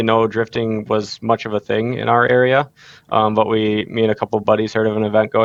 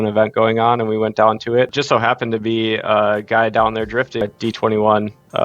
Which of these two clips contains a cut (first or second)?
second